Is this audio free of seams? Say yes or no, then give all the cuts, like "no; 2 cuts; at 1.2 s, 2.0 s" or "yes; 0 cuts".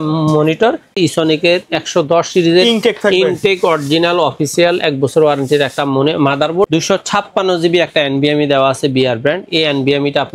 no; 2 cuts; at 1.0 s, 6.7 s